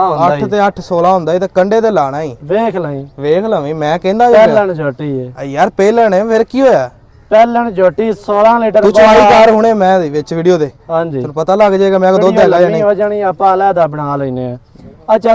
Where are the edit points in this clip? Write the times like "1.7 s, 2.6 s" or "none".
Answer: none